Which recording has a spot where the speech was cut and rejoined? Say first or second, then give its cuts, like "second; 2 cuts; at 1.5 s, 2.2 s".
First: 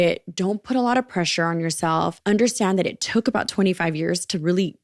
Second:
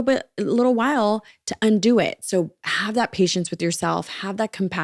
first; 1 cut; at 2.2 s